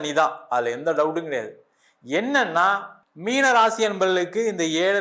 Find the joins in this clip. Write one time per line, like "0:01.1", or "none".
0:03.0